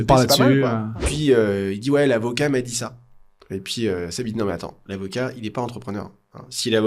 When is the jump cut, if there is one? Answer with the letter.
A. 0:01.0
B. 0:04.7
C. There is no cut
A